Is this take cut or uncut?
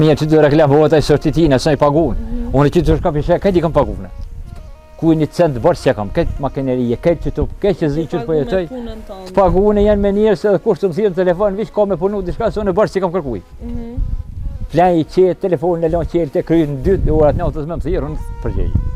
uncut